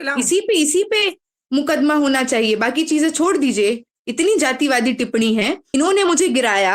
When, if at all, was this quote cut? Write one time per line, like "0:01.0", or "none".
0:05.6